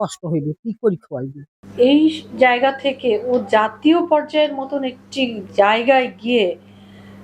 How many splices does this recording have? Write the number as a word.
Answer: one